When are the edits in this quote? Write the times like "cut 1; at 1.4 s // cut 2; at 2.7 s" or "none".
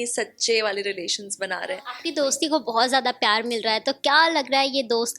cut 1; at 1.9 s